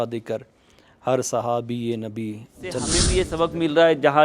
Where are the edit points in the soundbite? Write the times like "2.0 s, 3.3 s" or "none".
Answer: 3.0 s

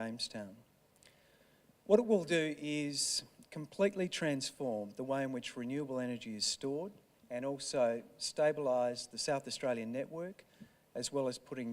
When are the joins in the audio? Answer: 4.6 s

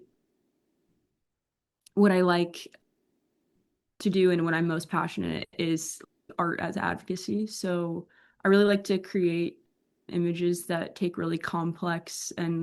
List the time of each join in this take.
none

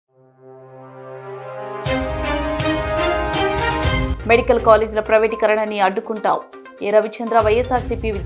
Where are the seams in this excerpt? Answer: 4.1 s

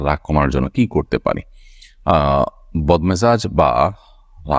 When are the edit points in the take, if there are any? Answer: none

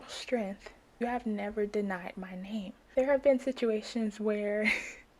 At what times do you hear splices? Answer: 1.0 s, 2.8 s

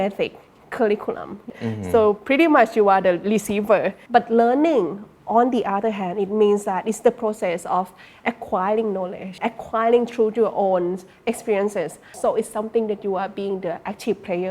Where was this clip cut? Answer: 1.5 s, 4.0 s, 9.3 s, 12.0 s

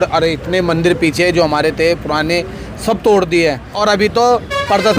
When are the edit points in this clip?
3.7 s

